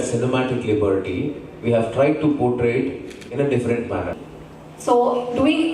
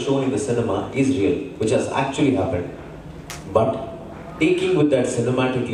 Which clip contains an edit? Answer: first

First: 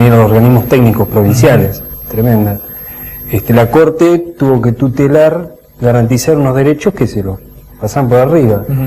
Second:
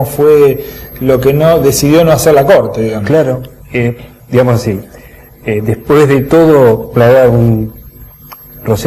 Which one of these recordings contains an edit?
first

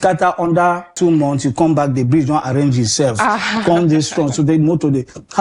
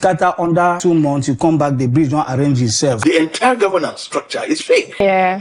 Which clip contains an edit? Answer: second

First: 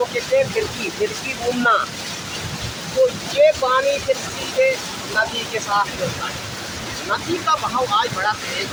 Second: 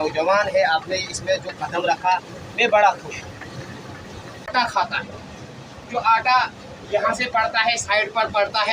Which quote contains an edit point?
second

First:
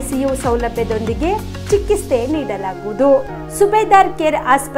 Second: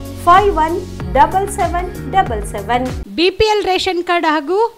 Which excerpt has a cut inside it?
second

